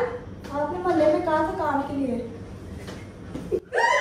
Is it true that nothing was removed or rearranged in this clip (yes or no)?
yes